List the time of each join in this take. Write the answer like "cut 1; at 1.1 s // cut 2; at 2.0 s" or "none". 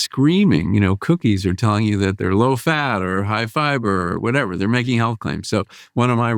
cut 1; at 2.2 s